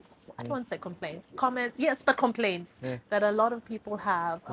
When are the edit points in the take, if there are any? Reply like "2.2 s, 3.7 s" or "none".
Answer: none